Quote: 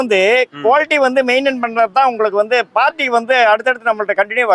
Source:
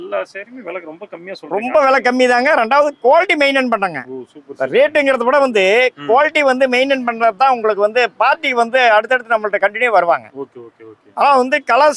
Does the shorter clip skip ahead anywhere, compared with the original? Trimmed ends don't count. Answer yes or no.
no